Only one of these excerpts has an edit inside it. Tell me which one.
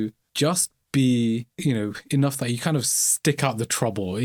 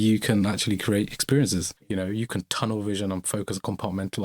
second; 1 cut; at 1.8 s

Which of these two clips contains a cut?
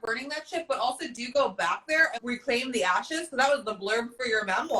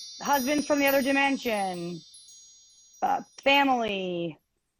first; 1 cut; at 2.2 s

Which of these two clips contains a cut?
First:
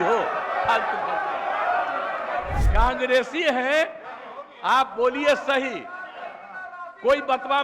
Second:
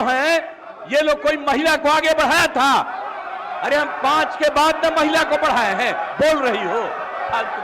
first; 1 cut; at 2.6 s

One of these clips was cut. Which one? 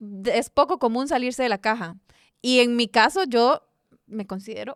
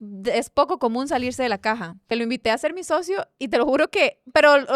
second; 1 cut; at 2.1 s

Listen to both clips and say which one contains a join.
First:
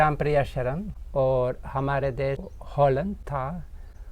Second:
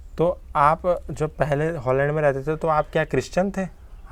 first; 3 cuts; at 0.9 s, 2.5 s, 3.2 s

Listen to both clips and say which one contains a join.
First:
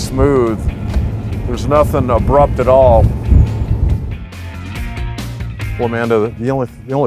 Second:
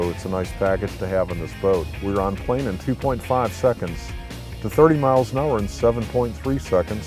second; 1 cut; at 5.9 s

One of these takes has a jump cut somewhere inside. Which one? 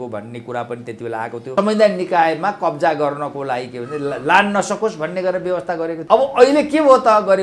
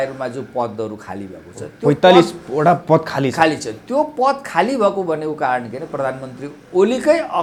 first; 2 cuts; at 1.5 s, 6.0 s

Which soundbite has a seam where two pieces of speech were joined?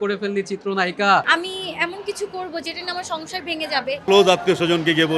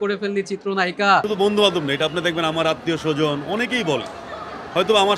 first; 2 cuts; at 1.2 s, 4.0 s

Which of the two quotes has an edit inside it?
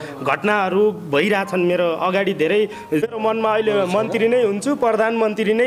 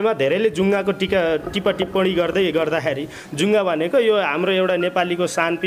first; 1 cut; at 3.0 s

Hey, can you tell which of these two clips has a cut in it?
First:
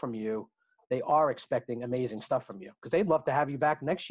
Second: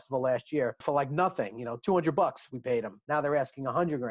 second; 2 cuts; at 0.8 s, 3.0 s

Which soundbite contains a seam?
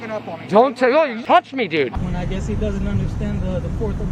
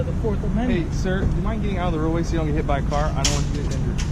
first; 1 cut; at 1.9 s

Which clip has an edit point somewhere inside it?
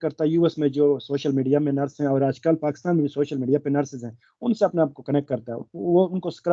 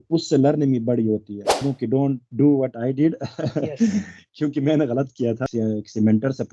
second; 2 cuts; at 1.6 s, 5.4 s

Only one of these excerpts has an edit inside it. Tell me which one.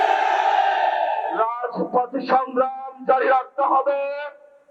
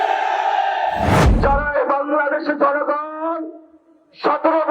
second; 1 cut; at 1.3 s

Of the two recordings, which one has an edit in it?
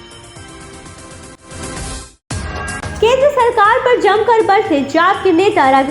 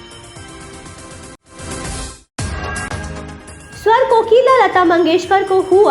second; 2 cuts; at 1.4 s, 3.5 s

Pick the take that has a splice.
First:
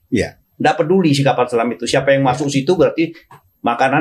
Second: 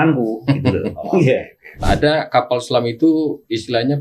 second; 1 cut; at 1.8 s

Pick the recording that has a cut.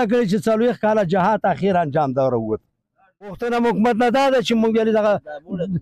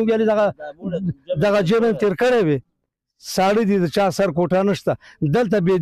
first; 1 cut; at 3.4 s

